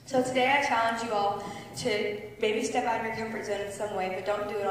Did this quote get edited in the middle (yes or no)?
no